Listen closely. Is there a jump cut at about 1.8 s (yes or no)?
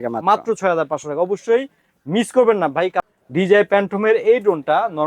no